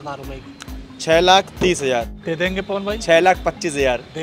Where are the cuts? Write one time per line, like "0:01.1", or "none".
0:02.2